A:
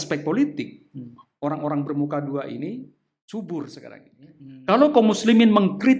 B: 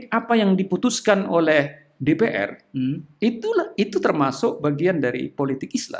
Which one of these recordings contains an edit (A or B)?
A